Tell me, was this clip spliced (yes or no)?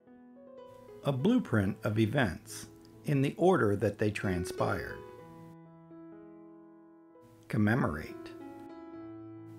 no